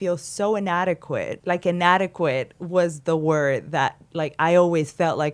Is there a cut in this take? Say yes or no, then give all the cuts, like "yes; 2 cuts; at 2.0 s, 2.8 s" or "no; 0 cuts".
yes; 1 cut; at 1.4 s